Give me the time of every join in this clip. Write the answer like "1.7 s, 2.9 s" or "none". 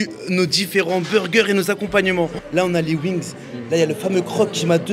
2.4 s